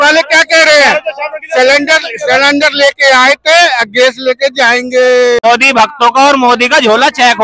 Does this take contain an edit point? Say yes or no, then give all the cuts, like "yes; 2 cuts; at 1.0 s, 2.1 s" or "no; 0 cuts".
yes; 1 cut; at 5.4 s